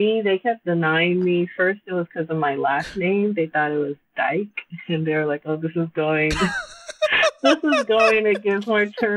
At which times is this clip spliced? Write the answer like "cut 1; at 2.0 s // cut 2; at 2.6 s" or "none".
none

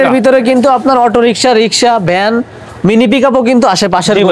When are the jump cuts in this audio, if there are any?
none

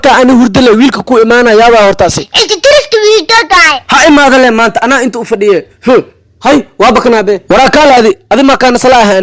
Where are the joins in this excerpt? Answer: none

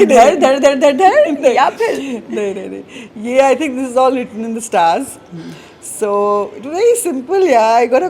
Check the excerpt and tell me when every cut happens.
none

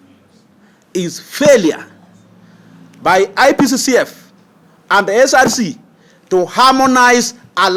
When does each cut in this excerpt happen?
none

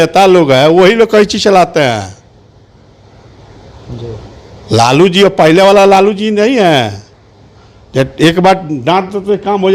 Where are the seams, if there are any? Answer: none

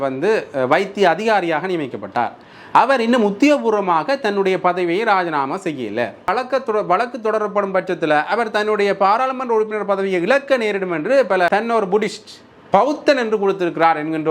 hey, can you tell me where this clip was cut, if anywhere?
cut 1; at 6.3 s // cut 2; at 11.5 s

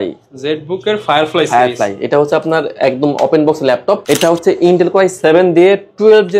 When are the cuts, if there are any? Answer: none

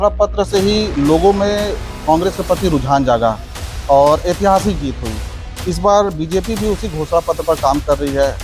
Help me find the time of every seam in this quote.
none

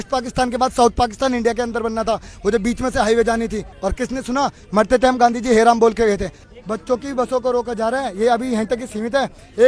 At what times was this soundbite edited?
cut 1; at 3.7 s // cut 2; at 6.5 s

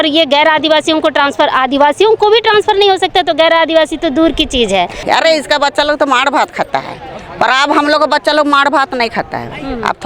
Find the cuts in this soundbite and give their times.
cut 1; at 5.0 s

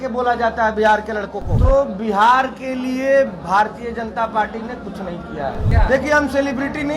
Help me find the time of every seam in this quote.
cut 1; at 1.4 s // cut 2; at 5.7 s

